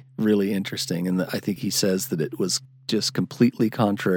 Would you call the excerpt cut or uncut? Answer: cut